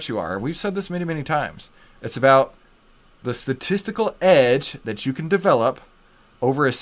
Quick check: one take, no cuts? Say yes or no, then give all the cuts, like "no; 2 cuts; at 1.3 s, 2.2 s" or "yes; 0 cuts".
yes; 0 cuts